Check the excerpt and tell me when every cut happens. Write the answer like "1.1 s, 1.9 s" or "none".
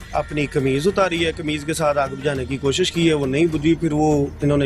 none